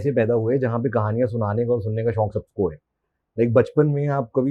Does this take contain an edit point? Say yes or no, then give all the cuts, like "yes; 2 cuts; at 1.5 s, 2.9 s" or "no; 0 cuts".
no; 0 cuts